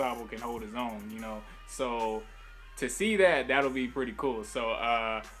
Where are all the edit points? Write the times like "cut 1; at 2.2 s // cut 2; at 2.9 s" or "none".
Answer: cut 1; at 4.2 s